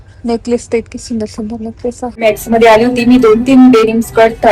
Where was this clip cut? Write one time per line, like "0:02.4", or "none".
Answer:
0:02.2